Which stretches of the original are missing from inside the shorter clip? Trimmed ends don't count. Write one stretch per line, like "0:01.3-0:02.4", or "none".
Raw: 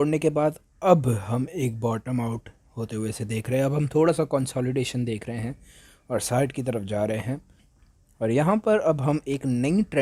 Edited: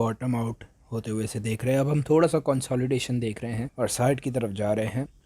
0:05.5-0:06.0